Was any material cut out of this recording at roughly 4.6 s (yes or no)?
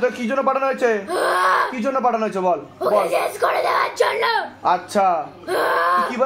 no